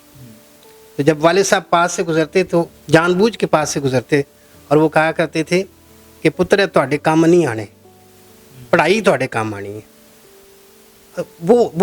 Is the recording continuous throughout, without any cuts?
yes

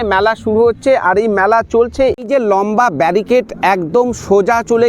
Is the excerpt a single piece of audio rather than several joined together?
no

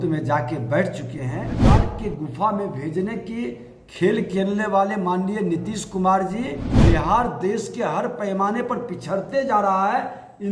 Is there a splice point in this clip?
yes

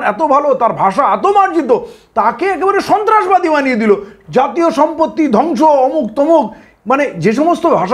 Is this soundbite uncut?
yes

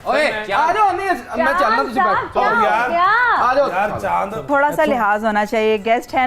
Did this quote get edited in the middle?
yes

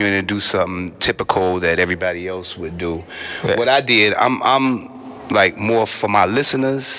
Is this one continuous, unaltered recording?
yes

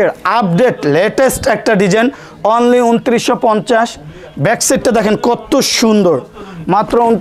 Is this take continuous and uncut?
yes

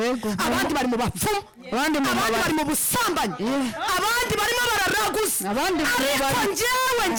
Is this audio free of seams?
yes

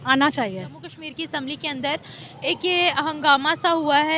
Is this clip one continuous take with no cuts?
no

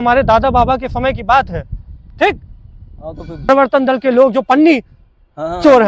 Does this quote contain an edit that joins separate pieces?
yes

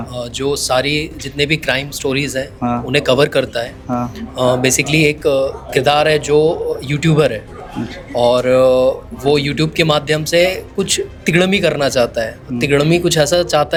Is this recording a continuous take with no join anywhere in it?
yes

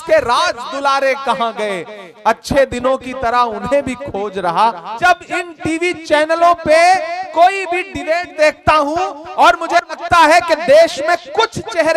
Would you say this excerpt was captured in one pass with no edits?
no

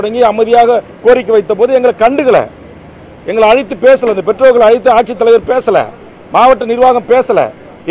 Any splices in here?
no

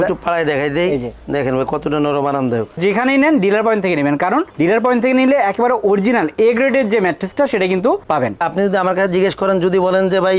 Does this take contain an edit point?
yes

